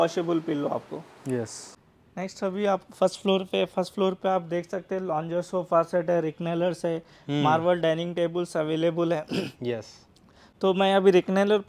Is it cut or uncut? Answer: uncut